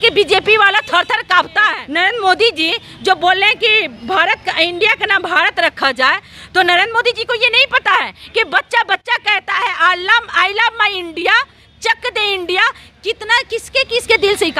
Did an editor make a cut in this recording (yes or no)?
yes